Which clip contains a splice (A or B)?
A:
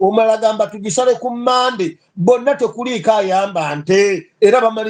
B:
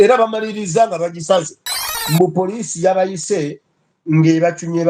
B